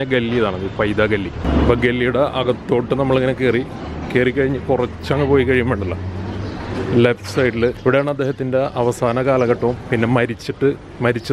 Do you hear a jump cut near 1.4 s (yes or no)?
yes